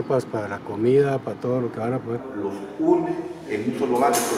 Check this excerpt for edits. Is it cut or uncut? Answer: cut